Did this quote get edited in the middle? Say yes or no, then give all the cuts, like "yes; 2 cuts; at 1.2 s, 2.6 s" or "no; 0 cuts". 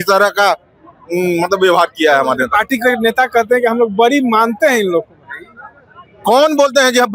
no; 0 cuts